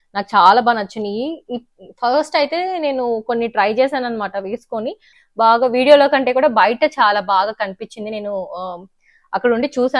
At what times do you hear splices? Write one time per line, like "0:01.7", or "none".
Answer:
0:05.1